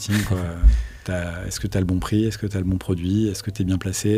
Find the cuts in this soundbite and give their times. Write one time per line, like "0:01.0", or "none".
none

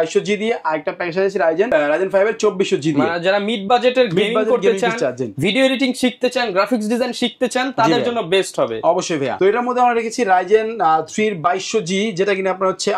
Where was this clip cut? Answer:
none

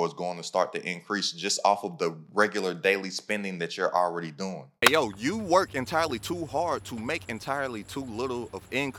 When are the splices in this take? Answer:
0:04.6

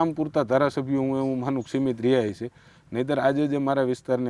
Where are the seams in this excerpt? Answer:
none

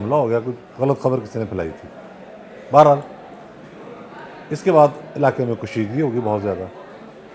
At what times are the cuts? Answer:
none

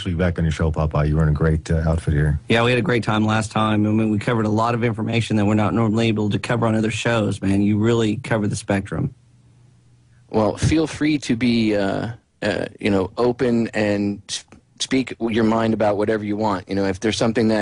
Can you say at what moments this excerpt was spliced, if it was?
0:07.6

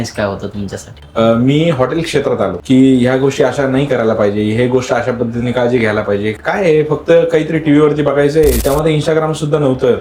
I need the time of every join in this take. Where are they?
0:01.0
0:02.6

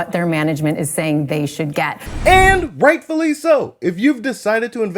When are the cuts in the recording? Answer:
none

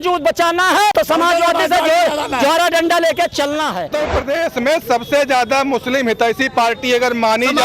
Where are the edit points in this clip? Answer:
0:00.9
0:03.9

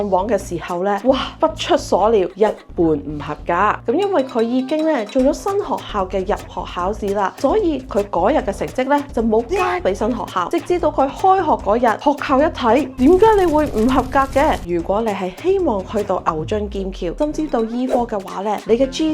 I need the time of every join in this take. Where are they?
0:03.8
0:12.0
0:14.6

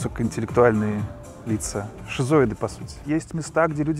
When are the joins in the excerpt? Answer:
0:02.0
0:02.9

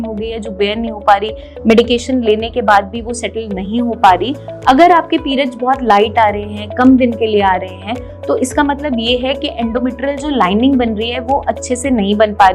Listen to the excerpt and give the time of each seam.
0:04.5

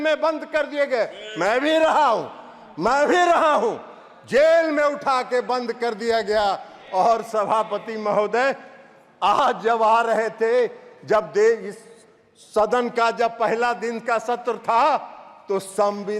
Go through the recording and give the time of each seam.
none

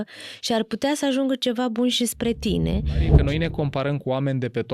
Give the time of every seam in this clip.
0:03.1

